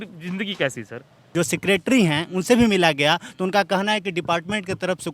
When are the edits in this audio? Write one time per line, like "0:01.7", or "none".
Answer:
0:01.2